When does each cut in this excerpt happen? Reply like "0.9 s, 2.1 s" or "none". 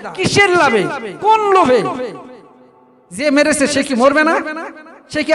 none